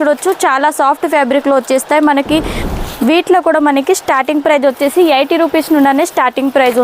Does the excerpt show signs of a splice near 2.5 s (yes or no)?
yes